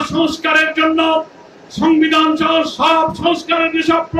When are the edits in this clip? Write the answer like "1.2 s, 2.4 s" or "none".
none